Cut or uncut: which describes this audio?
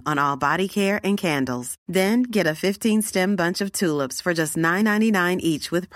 uncut